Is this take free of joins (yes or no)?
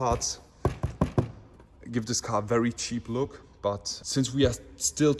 yes